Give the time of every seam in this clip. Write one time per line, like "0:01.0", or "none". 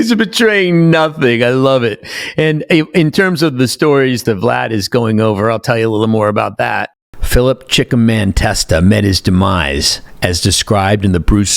0:04.2

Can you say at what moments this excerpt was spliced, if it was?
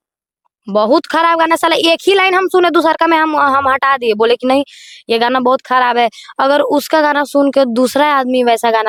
none

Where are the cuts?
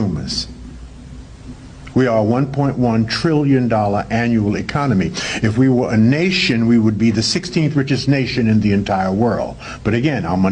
0:09.3

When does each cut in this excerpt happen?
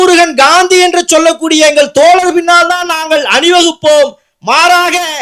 none

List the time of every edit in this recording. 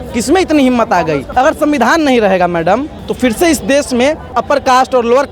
0:01.2
0:03.0
0:04.4

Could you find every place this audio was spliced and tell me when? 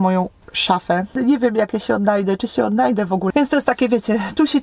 0:01.1
0:03.3

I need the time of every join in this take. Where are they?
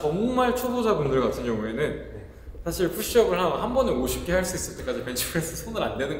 none

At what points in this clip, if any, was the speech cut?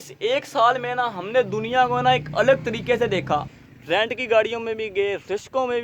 0:03.5

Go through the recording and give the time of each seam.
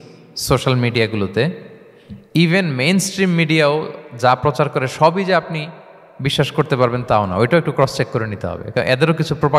none

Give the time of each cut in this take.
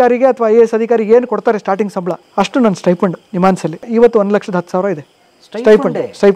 0:02.2
0:03.9

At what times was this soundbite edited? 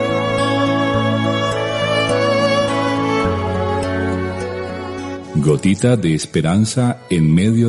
none

